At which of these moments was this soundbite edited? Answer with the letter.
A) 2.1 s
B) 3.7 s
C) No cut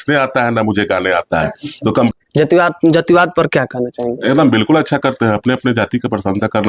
A